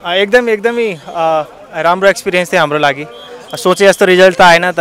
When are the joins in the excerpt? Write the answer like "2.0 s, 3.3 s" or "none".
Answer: none